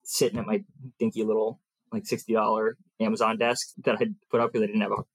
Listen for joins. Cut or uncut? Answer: uncut